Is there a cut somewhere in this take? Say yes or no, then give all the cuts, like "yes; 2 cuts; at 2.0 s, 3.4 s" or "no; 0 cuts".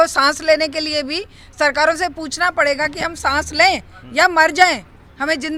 no; 0 cuts